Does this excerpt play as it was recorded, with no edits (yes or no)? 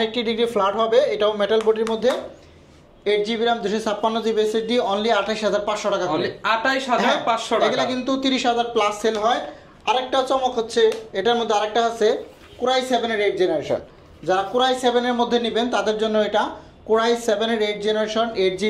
yes